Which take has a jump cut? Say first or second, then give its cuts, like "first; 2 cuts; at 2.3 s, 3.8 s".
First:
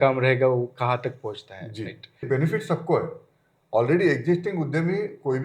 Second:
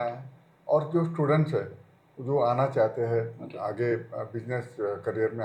first; 1 cut; at 2.3 s